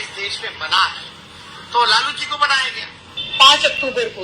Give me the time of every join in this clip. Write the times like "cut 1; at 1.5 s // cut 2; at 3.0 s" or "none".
cut 1; at 3.2 s